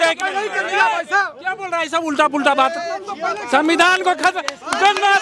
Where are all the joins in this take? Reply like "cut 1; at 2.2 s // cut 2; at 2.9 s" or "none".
none